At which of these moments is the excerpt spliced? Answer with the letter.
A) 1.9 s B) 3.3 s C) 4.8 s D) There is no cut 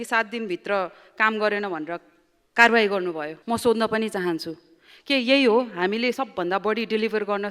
B